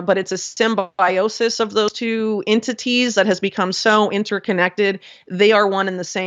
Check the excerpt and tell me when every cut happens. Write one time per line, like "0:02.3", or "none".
none